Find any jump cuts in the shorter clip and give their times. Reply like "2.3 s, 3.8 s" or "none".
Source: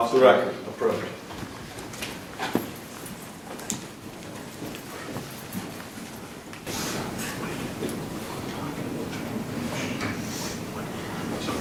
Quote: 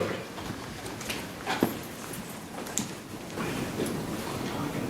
3.4 s